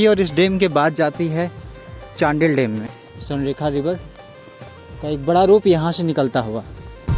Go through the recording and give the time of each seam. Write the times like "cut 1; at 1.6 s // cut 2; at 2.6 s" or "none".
none